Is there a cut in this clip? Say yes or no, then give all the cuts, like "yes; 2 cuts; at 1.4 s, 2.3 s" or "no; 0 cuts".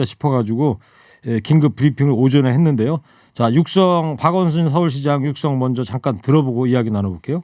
no; 0 cuts